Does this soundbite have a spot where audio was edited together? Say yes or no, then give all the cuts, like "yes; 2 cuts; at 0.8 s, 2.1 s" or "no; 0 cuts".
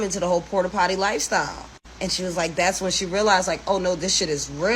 no; 0 cuts